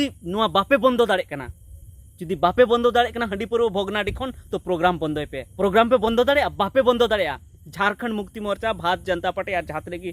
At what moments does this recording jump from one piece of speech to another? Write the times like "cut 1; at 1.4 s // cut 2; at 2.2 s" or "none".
cut 1; at 5.4 s